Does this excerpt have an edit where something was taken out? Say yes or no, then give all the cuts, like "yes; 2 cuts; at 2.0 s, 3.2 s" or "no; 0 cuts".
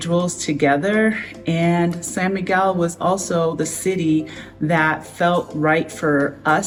no; 0 cuts